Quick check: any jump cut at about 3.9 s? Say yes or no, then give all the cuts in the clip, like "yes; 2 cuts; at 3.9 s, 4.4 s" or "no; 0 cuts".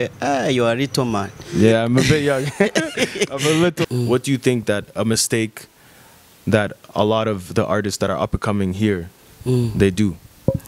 yes; 1 cut; at 3.9 s